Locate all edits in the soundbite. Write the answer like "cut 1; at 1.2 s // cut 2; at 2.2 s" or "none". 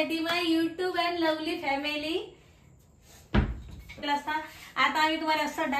cut 1; at 4.0 s